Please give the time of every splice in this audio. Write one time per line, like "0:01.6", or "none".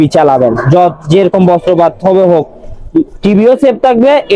none